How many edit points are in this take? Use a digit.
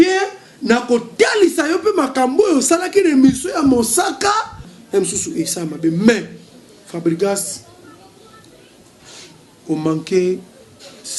1